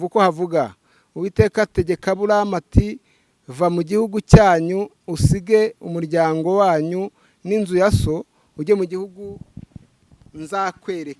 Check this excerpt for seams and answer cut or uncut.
uncut